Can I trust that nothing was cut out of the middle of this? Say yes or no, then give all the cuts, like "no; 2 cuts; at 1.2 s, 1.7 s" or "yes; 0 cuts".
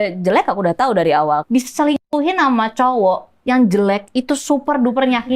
no; 1 cut; at 1.4 s